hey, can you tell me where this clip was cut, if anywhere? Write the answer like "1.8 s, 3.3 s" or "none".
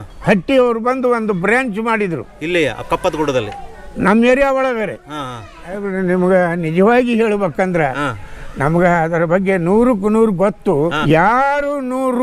5.8 s, 11.0 s